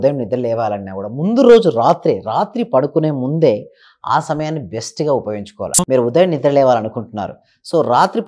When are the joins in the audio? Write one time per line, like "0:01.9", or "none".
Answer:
0:05.7